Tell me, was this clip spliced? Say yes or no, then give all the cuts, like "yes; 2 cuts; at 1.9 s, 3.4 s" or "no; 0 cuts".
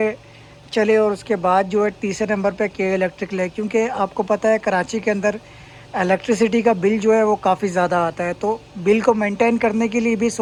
no; 0 cuts